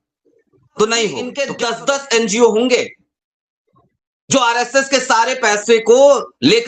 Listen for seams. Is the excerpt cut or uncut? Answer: cut